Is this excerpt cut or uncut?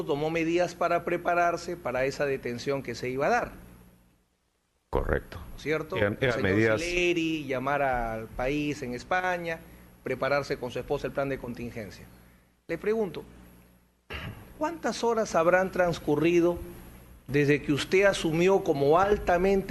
uncut